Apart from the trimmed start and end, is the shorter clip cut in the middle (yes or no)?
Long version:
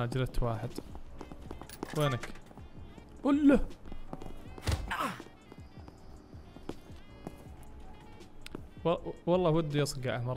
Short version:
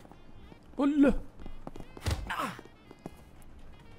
yes